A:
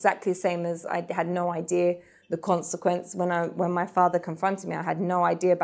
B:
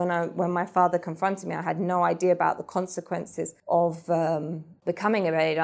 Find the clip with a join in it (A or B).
B